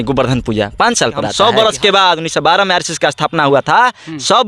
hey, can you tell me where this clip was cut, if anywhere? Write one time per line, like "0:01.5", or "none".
0:01.3